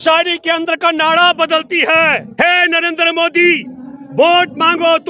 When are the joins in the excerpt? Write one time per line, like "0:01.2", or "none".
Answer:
0:02.3